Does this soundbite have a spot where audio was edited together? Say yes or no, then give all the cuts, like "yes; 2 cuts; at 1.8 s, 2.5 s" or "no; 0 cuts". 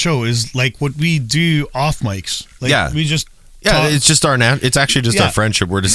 no; 0 cuts